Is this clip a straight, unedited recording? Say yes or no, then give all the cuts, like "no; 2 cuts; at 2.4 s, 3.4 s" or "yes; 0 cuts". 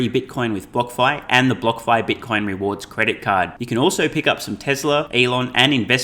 no; 1 cut; at 5.1 s